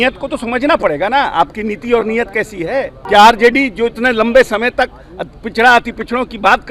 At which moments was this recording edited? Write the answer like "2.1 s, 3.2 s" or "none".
2.9 s